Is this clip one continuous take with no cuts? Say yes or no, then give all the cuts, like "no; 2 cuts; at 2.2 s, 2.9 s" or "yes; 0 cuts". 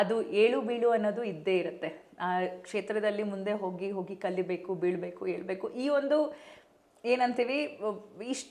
yes; 0 cuts